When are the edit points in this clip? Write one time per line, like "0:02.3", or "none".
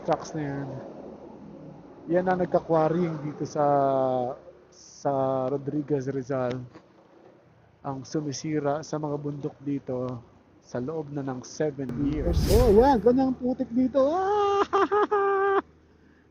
0:12.4